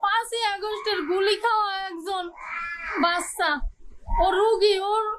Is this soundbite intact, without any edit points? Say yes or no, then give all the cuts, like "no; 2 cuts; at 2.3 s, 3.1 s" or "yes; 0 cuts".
yes; 0 cuts